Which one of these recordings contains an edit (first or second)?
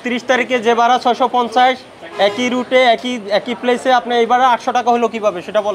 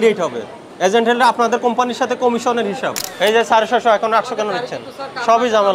second